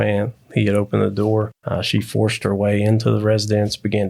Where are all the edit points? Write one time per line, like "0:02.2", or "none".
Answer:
0:01.6